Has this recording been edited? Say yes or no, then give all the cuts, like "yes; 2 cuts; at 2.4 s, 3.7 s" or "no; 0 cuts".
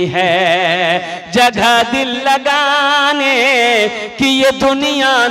no; 0 cuts